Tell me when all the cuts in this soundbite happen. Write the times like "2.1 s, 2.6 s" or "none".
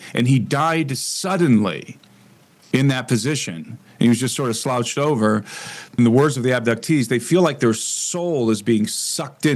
5.9 s